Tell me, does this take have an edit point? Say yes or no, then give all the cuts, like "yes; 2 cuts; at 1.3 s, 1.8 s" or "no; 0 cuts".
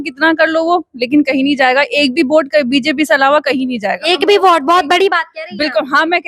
no; 0 cuts